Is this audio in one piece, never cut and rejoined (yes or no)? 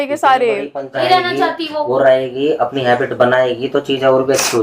no